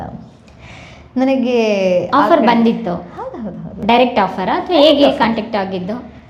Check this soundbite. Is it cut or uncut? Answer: uncut